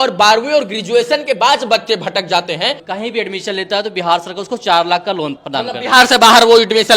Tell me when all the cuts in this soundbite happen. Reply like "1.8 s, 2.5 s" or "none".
2.8 s, 5.4 s

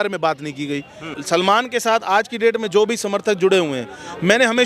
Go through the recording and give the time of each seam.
1.1 s

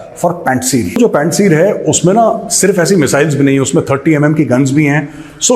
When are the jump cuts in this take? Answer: 1.0 s

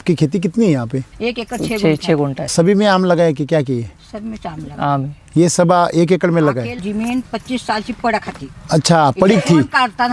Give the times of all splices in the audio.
1.1 s, 2.5 s, 6.8 s

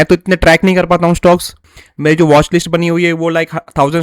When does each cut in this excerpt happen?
1.8 s

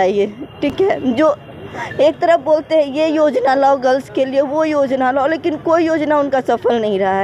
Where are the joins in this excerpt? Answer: none

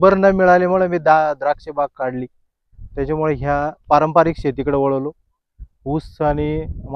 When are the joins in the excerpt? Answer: none

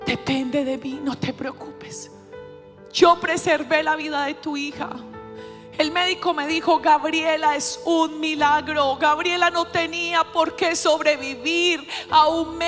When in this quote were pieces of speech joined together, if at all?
none

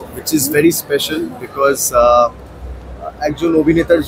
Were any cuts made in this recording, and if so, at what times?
none

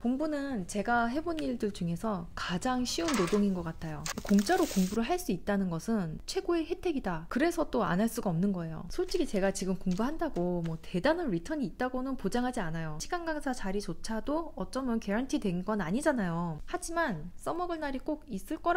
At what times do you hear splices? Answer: 4.2 s, 6.2 s, 7.2 s, 8.8 s, 13.0 s, 16.6 s

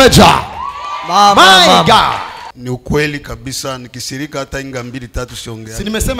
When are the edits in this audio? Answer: 2.4 s

